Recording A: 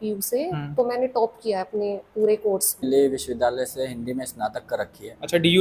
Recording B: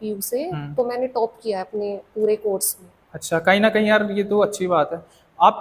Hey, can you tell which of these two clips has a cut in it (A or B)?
A